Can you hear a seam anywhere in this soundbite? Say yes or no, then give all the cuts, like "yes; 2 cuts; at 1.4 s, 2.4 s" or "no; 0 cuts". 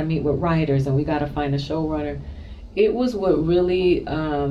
no; 0 cuts